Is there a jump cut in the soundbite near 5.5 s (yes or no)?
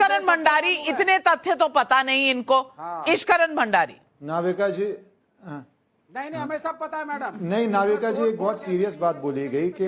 no